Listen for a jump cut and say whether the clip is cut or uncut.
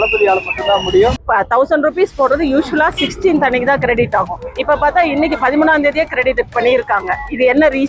cut